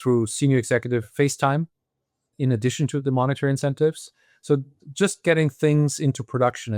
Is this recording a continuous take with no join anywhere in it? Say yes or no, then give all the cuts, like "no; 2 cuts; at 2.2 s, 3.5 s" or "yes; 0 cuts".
no; 2 cuts; at 1.2 s, 3.0 s